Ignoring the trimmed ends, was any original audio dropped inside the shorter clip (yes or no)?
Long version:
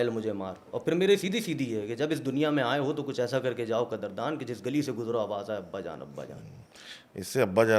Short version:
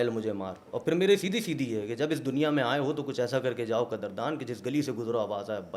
no